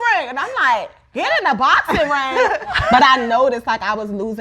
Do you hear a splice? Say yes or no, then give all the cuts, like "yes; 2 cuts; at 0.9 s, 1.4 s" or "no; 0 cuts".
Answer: yes; 1 cut; at 2.7 s